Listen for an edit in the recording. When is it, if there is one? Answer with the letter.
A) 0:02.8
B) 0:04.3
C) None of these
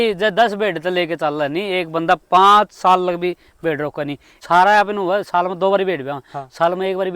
B